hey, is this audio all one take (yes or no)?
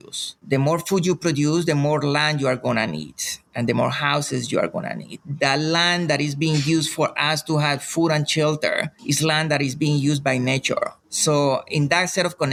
yes